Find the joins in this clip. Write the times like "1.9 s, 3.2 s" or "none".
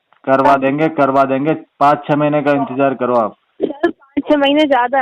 none

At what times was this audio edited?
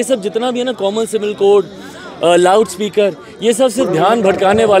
none

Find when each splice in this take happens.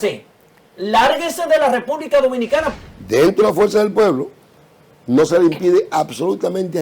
2.8 s

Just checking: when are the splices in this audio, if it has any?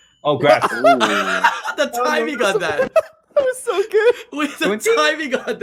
none

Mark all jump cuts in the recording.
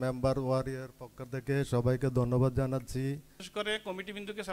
3.4 s

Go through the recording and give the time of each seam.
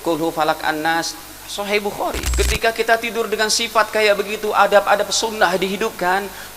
2.3 s

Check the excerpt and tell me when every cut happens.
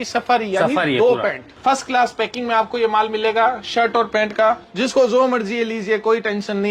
1.5 s, 4.7 s

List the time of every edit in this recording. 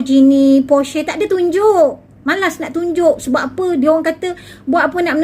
none

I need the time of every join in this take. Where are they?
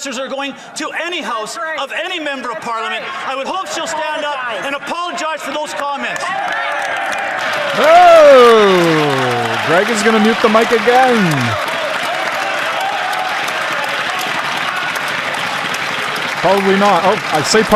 none

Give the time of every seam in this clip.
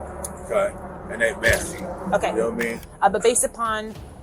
2.8 s

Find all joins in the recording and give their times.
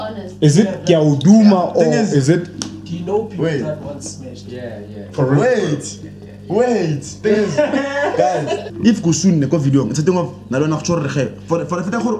8.7 s

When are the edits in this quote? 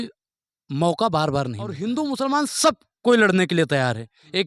1.7 s

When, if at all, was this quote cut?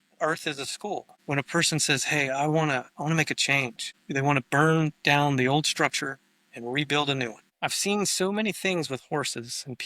1.1 s, 3.9 s, 7.4 s

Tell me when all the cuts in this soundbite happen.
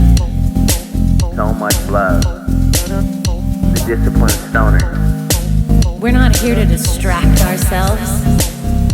3.8 s

